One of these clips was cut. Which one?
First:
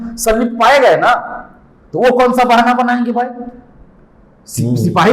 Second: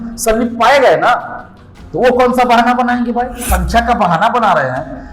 second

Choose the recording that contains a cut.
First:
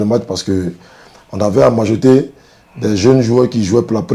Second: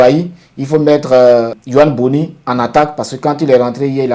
second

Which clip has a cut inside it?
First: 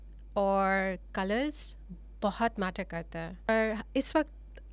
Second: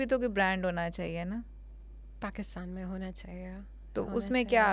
first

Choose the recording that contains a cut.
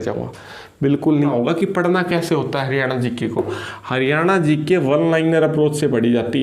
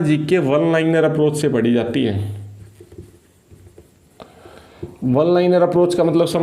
first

